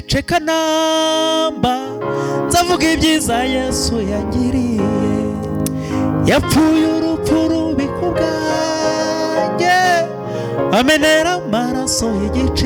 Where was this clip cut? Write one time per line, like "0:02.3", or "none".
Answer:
none